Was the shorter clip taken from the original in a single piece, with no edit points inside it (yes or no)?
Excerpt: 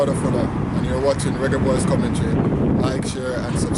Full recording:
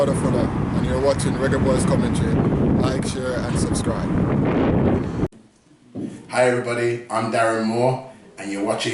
yes